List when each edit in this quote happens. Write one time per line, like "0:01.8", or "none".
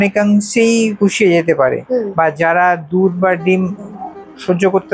0:01.8

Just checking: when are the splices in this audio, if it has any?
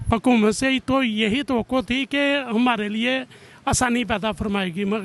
none

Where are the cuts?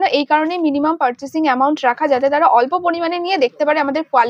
none

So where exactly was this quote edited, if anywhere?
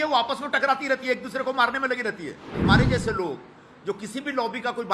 0:02.5

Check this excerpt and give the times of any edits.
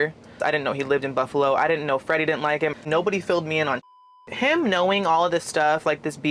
0:02.7
0:04.2

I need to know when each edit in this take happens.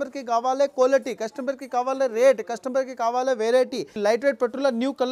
0:03.9

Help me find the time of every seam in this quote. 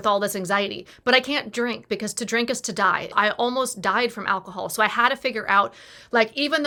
none

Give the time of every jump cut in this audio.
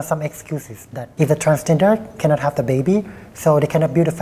0:01.0

